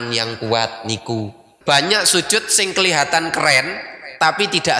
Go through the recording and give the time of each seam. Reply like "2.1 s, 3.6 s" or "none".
1.5 s